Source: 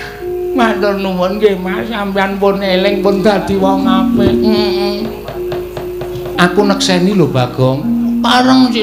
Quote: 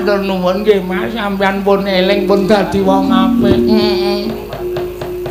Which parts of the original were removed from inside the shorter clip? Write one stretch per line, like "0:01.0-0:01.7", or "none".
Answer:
none